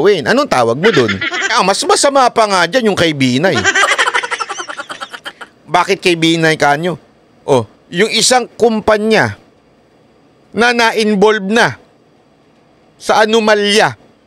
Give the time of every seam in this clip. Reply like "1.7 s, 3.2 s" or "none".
1.4 s